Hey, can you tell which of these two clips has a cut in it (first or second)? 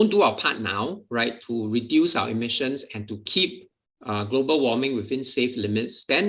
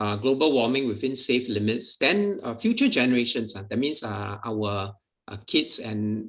first